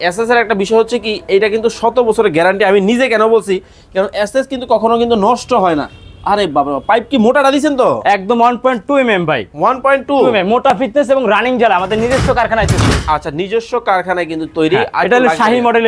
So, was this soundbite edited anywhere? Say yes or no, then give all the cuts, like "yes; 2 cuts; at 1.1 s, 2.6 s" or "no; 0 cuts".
no; 0 cuts